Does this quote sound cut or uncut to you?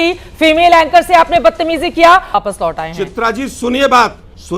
cut